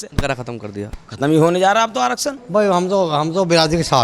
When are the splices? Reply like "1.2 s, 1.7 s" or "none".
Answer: 2.3 s